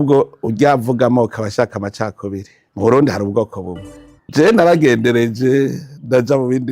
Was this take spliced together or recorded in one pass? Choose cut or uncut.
cut